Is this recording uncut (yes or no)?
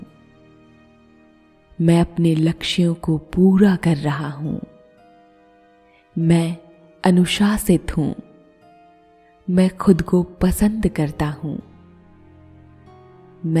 no